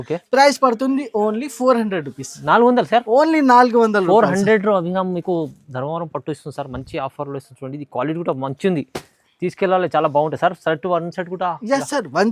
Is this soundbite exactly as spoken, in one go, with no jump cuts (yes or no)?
yes